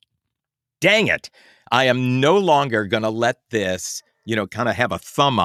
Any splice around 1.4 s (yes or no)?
no